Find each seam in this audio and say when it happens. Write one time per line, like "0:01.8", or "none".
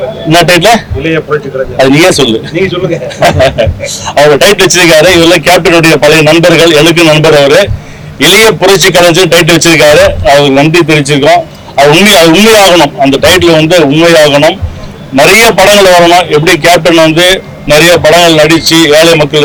none